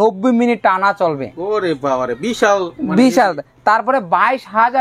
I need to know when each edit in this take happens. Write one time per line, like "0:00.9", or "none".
none

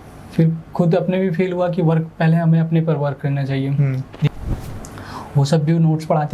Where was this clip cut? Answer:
0:04.3

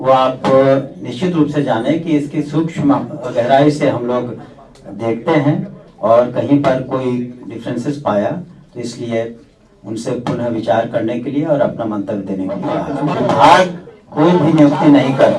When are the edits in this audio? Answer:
0:13.1

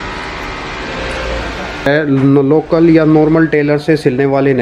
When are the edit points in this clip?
0:01.9

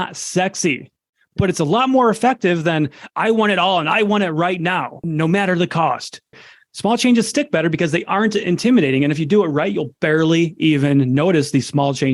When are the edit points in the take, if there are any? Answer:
0:05.0
0:06.5

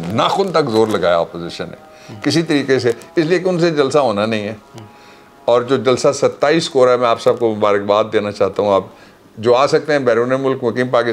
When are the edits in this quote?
none

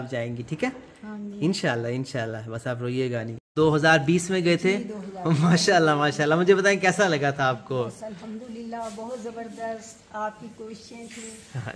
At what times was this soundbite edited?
0:03.5

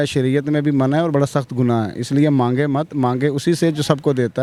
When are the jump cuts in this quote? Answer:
none

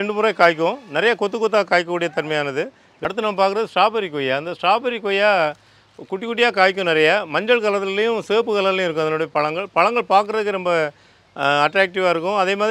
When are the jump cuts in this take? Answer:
0:02.8

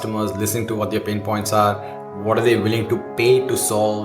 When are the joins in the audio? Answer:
none

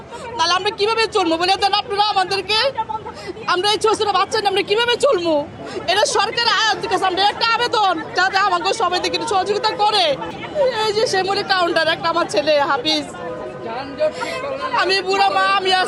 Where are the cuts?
none

